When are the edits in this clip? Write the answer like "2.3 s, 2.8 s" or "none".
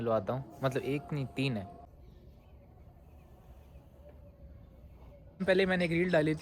1.9 s, 5.4 s